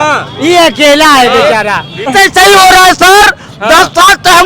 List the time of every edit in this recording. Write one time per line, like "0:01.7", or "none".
0:02.1